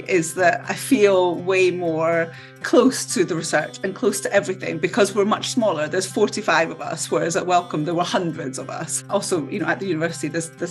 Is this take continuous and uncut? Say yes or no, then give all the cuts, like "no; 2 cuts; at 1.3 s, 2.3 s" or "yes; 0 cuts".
no; 1 cut; at 9.0 s